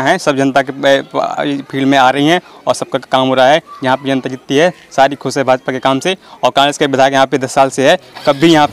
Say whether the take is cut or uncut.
uncut